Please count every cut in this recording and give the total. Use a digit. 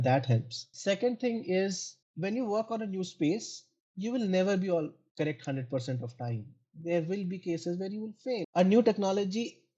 2